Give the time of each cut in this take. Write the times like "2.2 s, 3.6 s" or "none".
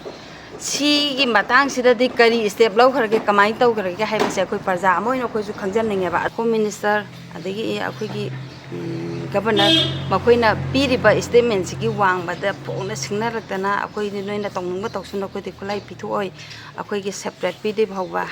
6.3 s